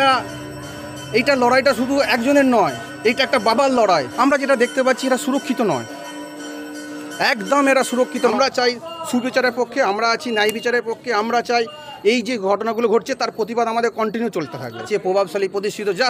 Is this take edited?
yes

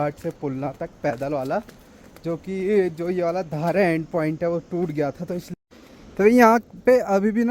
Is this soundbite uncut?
no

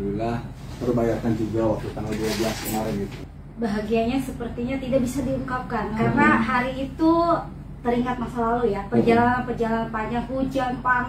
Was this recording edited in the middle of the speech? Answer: yes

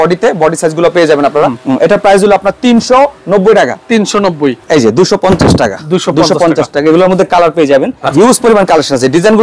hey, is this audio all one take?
no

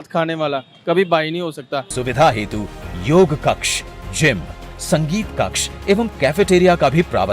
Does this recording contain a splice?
yes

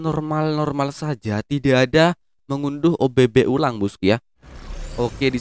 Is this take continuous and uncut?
no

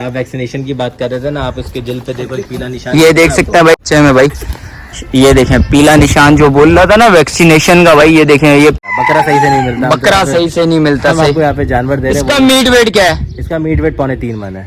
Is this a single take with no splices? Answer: no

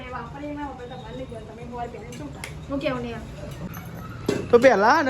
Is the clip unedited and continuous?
no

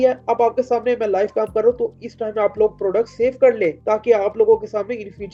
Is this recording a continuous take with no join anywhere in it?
yes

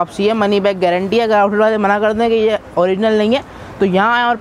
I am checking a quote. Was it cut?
no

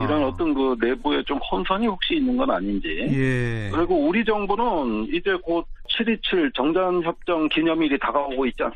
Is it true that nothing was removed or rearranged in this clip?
no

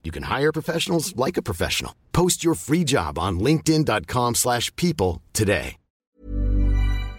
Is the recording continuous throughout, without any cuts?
no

